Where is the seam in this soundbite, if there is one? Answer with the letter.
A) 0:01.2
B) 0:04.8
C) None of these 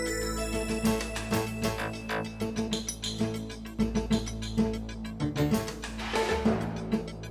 A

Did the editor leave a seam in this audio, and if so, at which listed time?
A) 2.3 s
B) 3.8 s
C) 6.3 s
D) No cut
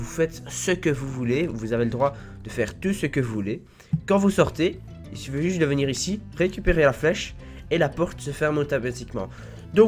D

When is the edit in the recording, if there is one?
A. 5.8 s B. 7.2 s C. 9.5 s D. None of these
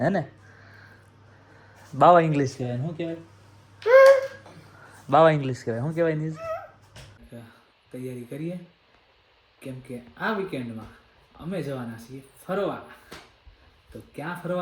B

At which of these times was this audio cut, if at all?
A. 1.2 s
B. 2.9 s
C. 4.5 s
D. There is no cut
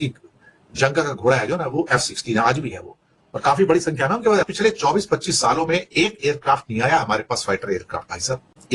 C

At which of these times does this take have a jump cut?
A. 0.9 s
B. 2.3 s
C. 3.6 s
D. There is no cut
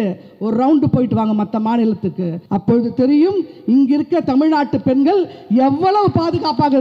B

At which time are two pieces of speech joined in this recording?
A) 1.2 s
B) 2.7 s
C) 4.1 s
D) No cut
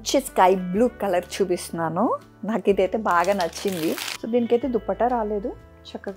C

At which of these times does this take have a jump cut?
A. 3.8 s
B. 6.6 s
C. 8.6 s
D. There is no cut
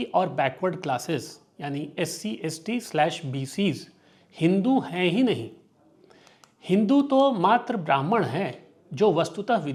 D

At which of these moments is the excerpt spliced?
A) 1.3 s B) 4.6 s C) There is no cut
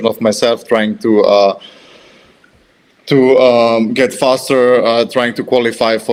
C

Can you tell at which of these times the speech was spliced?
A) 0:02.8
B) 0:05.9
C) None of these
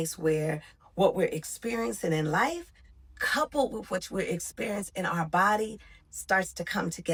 C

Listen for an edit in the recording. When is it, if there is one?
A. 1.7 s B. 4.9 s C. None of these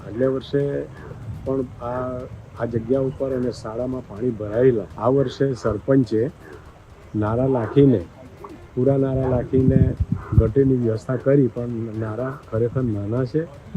B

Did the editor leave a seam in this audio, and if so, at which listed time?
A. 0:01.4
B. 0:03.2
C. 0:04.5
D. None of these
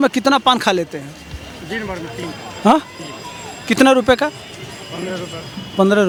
D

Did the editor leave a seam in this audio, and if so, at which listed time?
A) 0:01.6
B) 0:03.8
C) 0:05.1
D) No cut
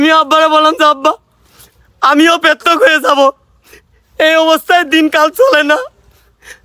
D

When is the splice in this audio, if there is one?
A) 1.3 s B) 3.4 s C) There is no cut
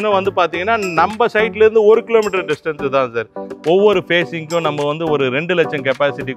B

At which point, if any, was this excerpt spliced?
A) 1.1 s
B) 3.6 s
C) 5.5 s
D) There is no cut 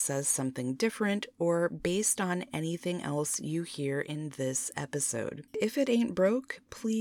C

